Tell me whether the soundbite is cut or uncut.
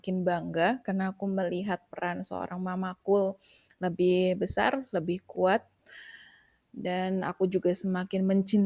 uncut